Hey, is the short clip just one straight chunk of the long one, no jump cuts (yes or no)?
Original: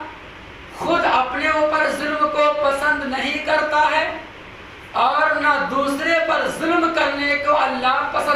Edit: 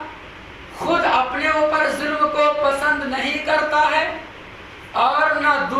yes